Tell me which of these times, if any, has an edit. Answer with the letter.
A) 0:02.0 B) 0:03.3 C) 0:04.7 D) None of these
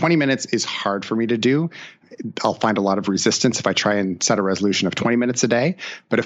A